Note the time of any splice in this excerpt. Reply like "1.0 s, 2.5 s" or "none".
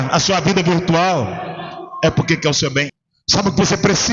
2.9 s